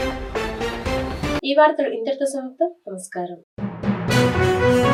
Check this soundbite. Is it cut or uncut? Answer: uncut